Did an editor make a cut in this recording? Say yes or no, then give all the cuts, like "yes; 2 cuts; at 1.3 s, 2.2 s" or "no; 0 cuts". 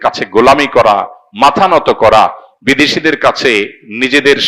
no; 0 cuts